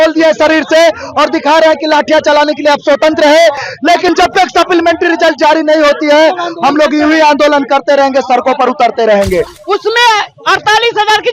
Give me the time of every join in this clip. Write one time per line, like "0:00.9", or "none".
0:09.6